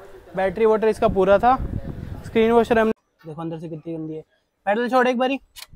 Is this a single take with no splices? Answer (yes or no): no